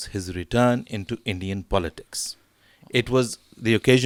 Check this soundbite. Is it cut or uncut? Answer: uncut